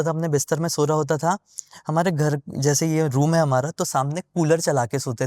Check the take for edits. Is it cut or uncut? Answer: uncut